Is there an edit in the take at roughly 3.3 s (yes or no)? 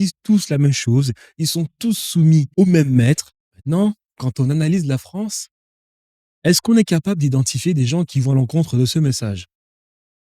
yes